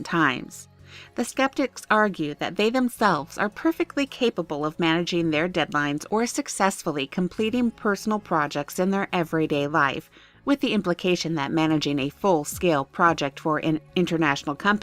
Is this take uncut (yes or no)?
no